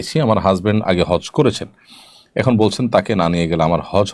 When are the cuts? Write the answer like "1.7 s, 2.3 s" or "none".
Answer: none